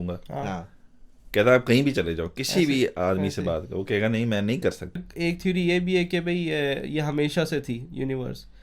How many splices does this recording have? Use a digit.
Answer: 1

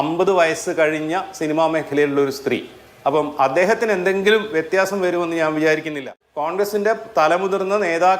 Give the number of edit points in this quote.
1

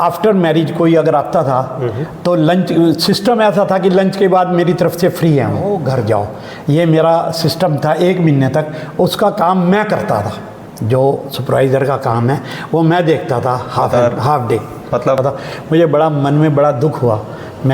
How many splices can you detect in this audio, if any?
2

